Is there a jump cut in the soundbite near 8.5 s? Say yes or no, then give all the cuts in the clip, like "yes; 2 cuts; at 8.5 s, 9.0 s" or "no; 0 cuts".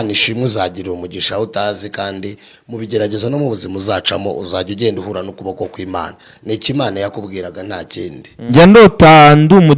yes; 1 cut; at 8.5 s